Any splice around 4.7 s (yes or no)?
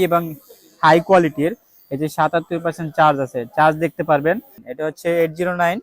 yes